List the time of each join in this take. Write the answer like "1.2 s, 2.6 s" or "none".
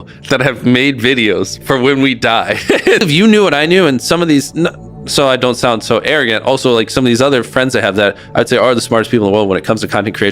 3.0 s